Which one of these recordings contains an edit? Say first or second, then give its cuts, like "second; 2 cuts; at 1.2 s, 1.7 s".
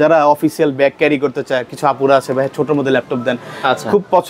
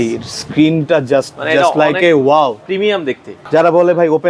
second; 1 cut; at 3.3 s